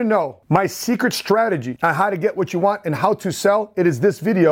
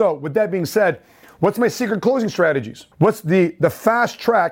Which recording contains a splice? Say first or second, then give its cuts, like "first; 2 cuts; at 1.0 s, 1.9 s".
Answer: first; 1 cut; at 1.7 s